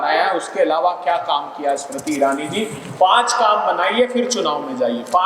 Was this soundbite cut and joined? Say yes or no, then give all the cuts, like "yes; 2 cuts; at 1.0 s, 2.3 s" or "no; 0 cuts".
no; 0 cuts